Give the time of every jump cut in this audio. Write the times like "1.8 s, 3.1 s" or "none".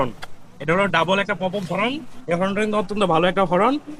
none